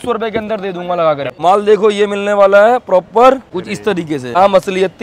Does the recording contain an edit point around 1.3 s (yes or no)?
yes